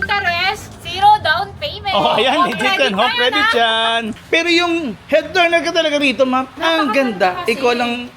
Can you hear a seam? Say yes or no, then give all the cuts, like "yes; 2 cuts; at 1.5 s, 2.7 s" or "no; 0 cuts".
yes; 1 cut; at 4.2 s